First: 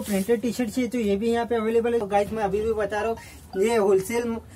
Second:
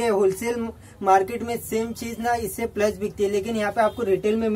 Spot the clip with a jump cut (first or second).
first